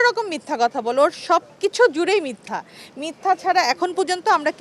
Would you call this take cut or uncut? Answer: uncut